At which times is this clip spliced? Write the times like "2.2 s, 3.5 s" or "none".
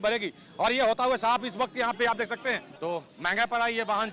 2.7 s